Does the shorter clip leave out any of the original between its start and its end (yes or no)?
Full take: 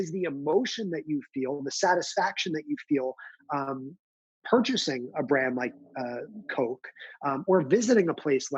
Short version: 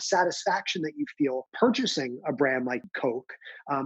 yes